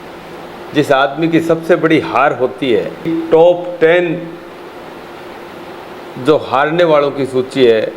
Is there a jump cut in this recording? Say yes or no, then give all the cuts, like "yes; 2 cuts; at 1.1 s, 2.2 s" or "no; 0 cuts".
yes; 1 cut; at 3.1 s